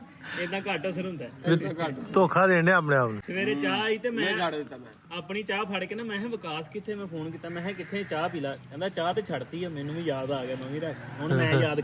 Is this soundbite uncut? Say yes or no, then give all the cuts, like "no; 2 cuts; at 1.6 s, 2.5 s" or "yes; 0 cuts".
yes; 0 cuts